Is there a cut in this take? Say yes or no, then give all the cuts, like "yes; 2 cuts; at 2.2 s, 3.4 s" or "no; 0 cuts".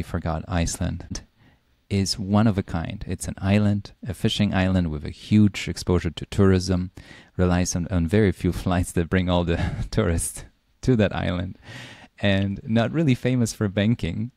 yes; 1 cut; at 1.1 s